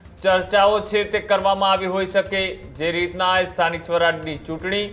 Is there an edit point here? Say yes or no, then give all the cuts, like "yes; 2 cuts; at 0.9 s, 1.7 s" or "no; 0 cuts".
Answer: no; 0 cuts